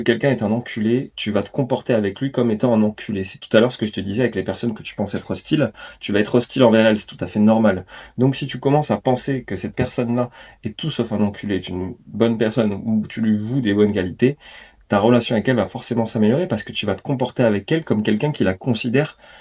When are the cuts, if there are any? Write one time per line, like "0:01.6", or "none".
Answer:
none